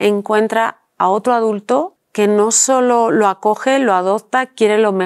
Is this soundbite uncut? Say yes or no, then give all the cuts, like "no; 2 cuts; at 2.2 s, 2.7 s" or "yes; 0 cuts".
yes; 0 cuts